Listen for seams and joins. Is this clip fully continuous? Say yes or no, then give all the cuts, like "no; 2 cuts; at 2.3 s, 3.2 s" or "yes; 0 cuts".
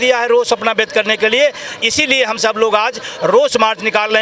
yes; 0 cuts